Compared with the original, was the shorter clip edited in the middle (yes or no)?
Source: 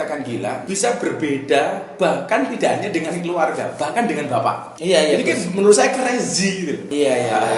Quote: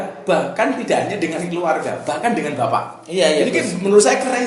no